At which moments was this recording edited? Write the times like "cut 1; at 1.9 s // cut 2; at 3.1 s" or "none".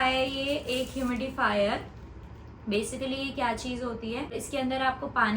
cut 1; at 4.4 s